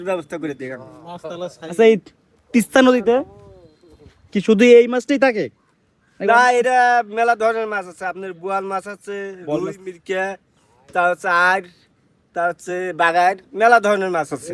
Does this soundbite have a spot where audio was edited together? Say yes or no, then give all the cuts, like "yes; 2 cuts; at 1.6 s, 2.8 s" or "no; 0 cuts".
no; 0 cuts